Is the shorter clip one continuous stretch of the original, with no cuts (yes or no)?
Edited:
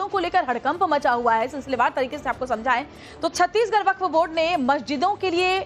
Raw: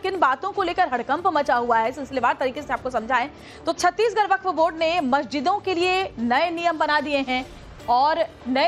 yes